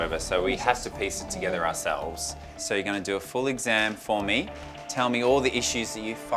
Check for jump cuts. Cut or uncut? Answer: uncut